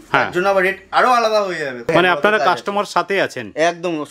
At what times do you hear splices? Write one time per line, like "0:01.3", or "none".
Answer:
0:01.9